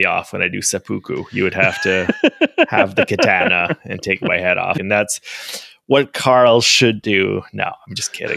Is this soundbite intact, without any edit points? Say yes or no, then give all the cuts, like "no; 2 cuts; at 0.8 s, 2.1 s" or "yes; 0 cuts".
no; 1 cut; at 4.8 s